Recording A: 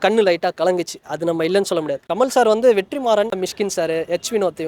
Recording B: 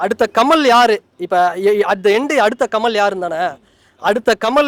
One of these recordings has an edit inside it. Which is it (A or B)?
A